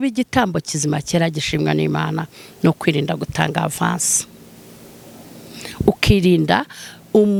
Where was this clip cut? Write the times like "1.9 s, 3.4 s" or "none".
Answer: none